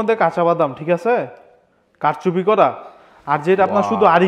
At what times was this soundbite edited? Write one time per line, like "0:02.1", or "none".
none